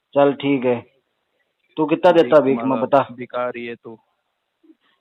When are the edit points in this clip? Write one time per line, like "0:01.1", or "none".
none